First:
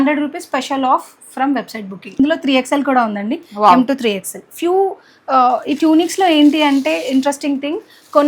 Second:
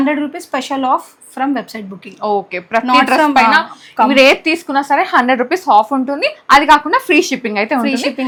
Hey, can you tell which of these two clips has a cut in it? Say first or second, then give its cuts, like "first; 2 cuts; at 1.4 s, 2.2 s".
first; 1 cut; at 2.2 s